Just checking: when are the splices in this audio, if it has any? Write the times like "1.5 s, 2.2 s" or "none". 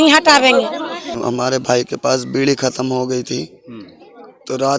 1.1 s